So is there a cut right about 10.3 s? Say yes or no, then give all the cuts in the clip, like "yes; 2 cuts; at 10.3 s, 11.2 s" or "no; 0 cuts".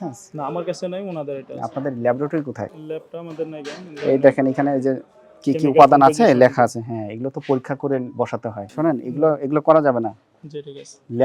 no; 2 cuts; at 2.8 s, 8.7 s